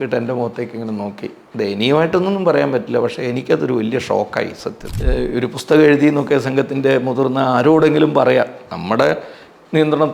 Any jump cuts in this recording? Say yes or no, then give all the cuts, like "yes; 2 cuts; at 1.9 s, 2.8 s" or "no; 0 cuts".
yes; 1 cut; at 4.8 s